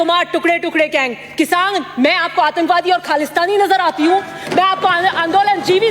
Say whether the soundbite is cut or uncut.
uncut